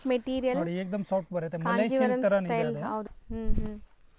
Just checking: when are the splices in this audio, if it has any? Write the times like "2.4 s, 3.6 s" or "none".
3.1 s